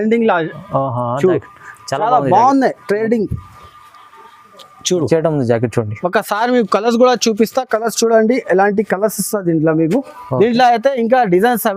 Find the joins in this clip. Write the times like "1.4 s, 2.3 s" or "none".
none

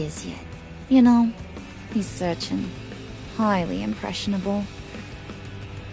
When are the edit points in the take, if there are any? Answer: 4.7 s

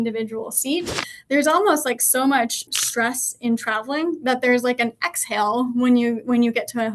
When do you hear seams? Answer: 1.1 s, 2.7 s

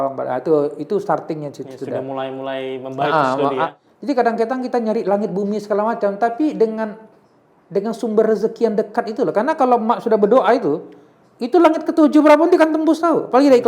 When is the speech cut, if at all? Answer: 3.8 s

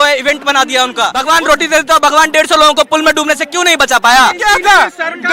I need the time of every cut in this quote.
1.2 s, 4.4 s

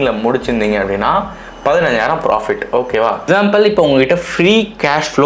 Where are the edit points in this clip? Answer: 3.3 s

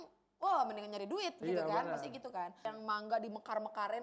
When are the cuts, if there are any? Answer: 2.6 s

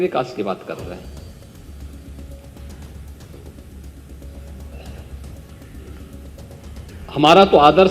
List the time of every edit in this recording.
none

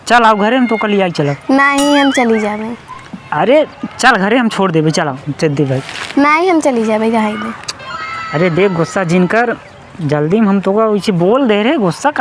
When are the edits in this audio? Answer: none

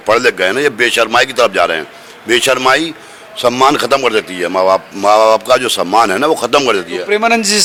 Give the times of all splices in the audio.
none

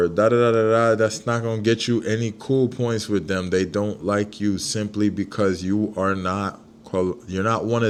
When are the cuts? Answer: none

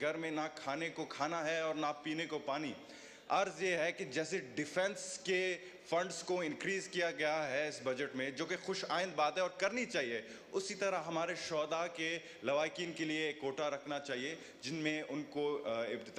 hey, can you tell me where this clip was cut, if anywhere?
none

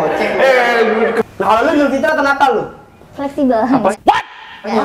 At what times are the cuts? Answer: 1.3 s

